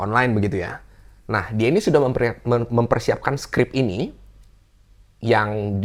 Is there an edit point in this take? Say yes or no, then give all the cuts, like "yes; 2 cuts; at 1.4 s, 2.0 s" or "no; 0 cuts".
no; 0 cuts